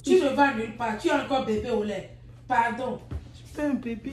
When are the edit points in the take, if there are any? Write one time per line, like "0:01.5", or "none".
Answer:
none